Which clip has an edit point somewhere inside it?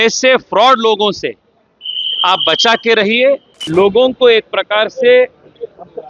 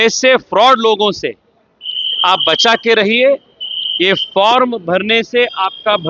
first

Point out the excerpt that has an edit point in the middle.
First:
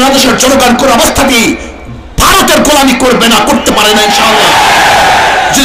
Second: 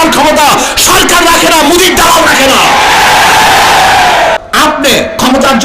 second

